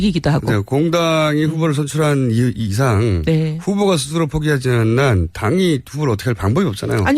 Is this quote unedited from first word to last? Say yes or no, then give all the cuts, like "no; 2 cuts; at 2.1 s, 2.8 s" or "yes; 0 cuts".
no; 1 cut; at 5.6 s